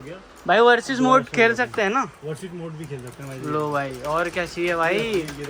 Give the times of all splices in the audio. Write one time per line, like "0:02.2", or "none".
none

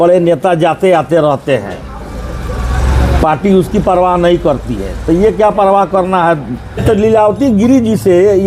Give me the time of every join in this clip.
0:06.8

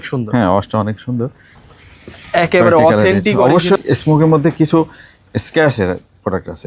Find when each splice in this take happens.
0:01.5
0:03.8

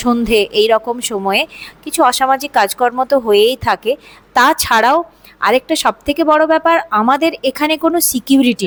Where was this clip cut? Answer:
none

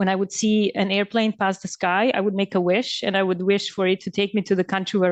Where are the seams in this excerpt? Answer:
none

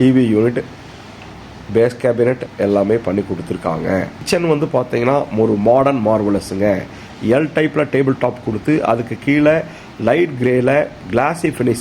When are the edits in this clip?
0:04.2

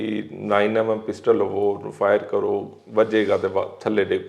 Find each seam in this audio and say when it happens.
none

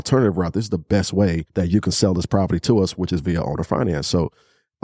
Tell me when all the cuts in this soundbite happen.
0:01.4

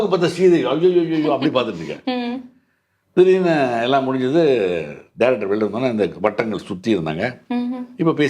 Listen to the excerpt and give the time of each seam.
none

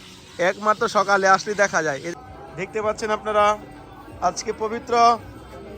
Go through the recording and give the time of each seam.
0:02.1

